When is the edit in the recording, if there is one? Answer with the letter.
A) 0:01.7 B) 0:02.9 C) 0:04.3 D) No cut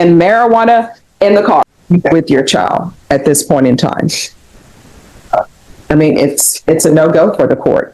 A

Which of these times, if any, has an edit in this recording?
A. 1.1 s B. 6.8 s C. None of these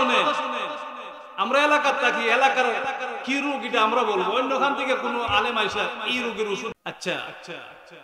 B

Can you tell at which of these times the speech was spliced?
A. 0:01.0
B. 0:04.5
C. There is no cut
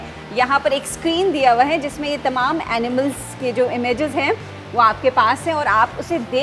C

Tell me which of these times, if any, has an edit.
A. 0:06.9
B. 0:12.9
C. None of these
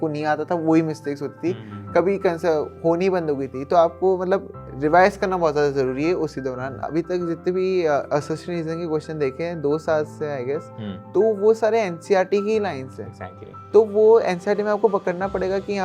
A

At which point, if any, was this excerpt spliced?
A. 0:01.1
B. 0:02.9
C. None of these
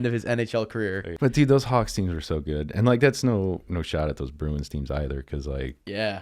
A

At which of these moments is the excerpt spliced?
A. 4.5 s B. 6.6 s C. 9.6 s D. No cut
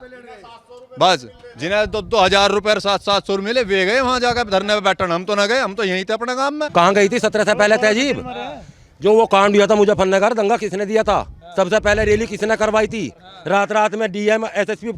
B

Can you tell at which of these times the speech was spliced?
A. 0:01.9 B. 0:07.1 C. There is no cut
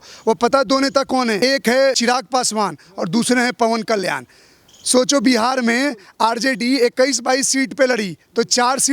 A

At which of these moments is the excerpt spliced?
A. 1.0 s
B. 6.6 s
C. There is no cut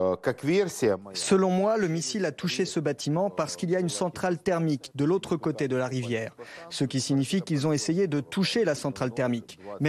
A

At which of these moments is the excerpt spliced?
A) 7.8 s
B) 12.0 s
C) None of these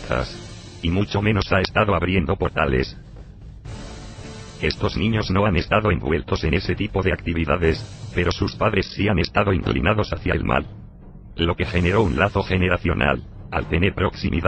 A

